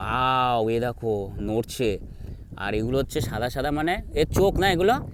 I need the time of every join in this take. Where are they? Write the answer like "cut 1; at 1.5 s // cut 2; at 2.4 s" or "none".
none

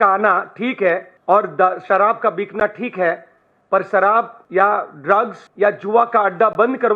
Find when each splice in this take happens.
cut 1; at 1.1 s // cut 2; at 4.4 s // cut 3; at 5.4 s

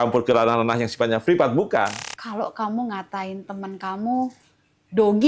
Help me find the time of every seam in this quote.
cut 1; at 2.0 s

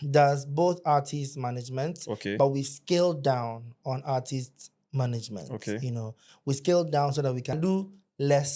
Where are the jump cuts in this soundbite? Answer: cut 1; at 7.6 s

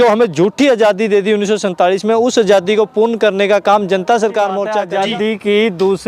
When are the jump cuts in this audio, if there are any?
cut 1; at 4.8 s

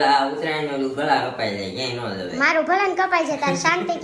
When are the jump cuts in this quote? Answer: none

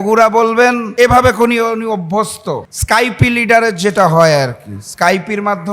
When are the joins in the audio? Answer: cut 1; at 0.8 s // cut 2; at 2.7 s

